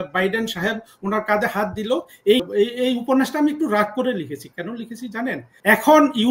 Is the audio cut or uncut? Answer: cut